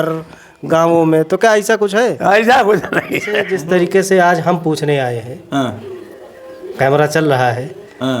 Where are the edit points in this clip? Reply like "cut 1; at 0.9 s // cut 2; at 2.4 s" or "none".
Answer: cut 1; at 3.5 s